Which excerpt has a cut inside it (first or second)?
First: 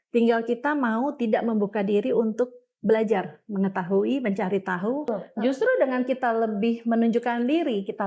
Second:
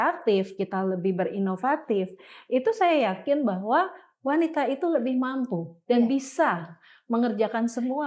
first